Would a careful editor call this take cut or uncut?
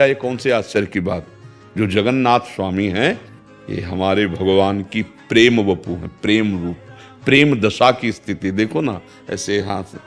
uncut